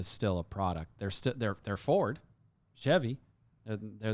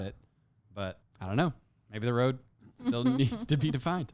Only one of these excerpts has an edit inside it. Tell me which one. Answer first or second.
second